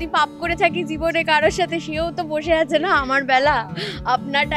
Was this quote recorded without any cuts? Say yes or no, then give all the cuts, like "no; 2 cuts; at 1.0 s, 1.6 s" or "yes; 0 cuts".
yes; 0 cuts